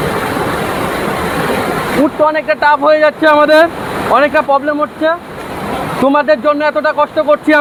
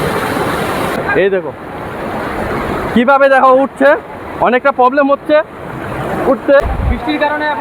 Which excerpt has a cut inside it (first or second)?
second